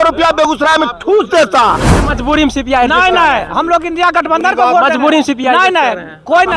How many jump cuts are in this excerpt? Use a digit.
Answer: 1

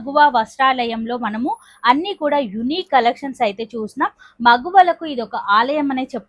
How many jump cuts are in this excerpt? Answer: 0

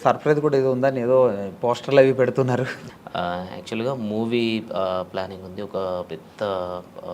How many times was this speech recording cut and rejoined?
1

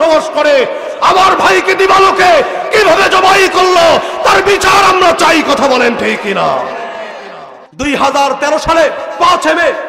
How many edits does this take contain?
1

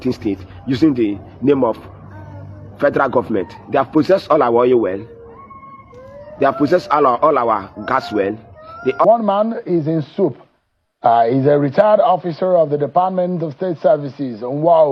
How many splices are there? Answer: 1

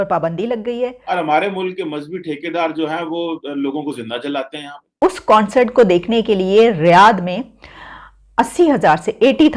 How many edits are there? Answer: 2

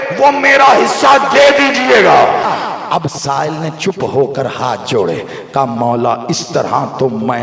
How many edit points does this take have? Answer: 1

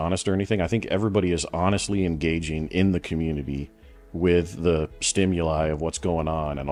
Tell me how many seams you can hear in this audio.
0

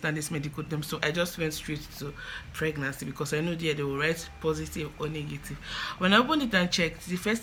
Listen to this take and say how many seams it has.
0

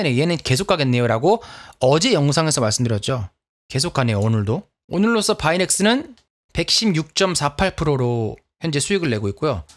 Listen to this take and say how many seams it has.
0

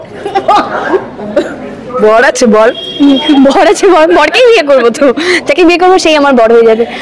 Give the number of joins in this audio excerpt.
0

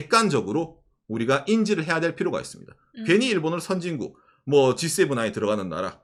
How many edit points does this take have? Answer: 0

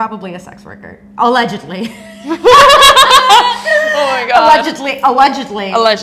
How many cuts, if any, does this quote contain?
0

